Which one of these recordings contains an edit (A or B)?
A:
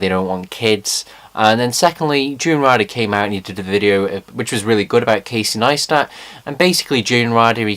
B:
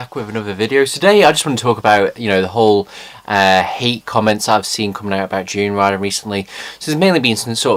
A